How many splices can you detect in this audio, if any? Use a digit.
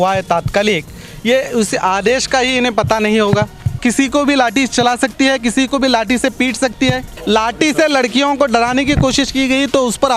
2